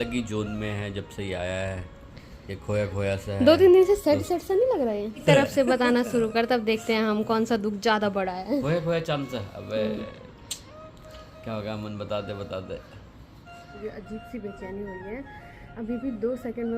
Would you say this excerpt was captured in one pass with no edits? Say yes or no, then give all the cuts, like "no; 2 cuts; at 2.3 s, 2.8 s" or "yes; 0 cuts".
no; 3 cuts; at 5.2 s, 8.6 s, 13.8 s